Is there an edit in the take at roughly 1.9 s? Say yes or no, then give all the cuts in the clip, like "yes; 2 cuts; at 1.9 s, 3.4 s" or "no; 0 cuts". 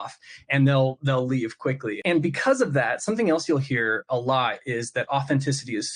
yes; 1 cut; at 1.9 s